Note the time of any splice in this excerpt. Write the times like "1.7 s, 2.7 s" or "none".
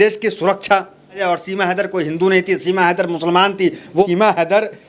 1.2 s, 4.0 s